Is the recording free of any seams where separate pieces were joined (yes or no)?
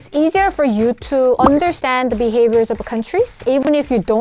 no